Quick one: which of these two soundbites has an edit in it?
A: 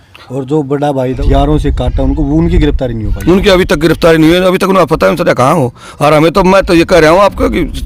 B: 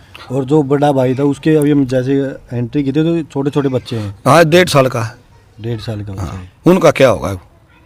A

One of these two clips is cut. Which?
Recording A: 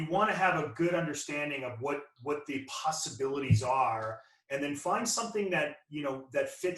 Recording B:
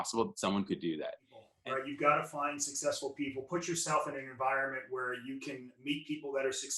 B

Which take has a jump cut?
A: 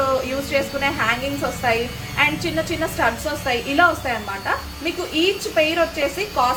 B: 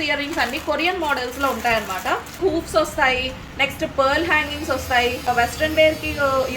B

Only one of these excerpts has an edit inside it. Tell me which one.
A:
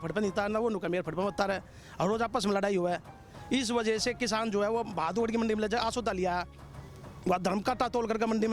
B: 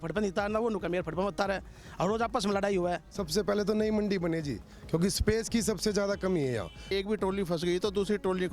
B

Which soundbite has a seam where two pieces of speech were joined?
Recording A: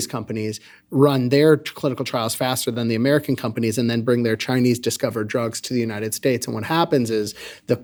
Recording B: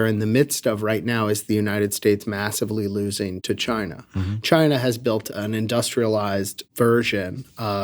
B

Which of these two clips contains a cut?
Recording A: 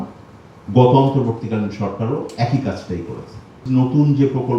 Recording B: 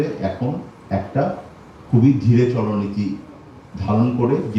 A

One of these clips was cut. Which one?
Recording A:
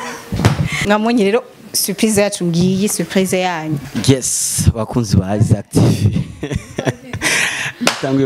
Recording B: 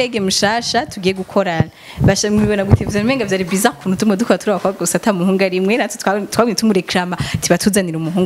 A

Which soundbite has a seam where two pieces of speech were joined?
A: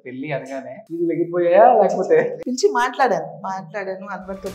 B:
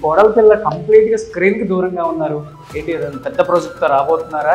A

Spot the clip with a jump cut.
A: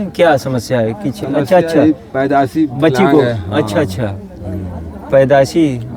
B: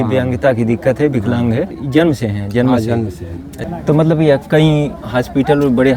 B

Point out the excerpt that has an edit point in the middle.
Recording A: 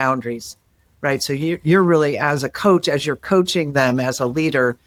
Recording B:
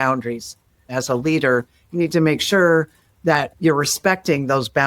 B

